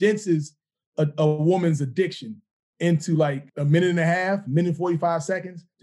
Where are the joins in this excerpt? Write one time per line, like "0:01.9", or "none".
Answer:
0:03.5